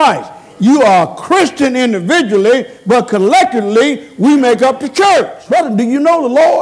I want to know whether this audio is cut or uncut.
cut